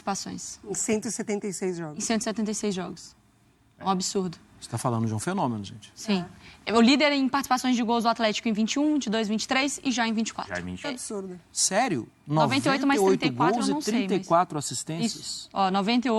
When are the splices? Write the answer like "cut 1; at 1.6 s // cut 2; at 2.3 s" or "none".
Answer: cut 1; at 10.8 s